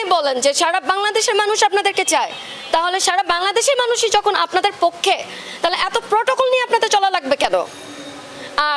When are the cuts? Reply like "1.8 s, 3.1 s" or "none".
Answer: none